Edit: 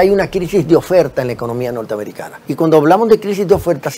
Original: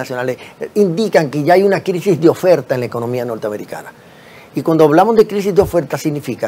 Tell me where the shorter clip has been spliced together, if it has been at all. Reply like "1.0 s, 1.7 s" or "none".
2.3 s